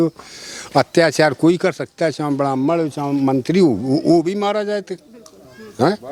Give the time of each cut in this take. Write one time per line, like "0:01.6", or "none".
none

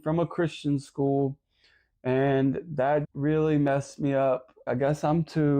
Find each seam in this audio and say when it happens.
0:03.1
0:04.6

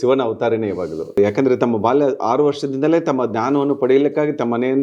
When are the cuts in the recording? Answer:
0:01.2

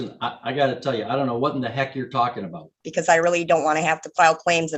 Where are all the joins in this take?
0:02.9

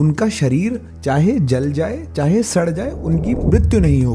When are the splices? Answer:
none

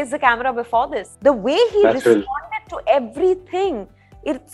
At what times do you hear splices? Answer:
0:01.0

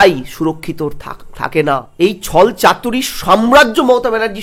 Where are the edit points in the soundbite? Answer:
0:01.9

